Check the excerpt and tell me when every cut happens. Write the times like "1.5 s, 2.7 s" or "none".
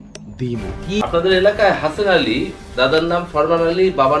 1.0 s